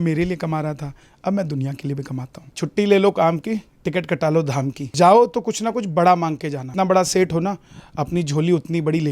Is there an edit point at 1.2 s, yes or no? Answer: no